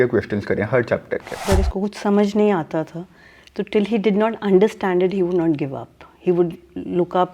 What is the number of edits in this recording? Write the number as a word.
one